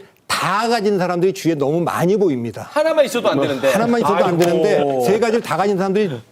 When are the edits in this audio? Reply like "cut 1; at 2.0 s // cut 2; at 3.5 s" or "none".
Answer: none